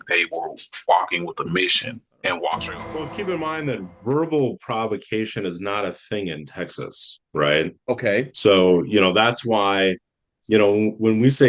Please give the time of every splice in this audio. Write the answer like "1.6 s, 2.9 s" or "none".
2.7 s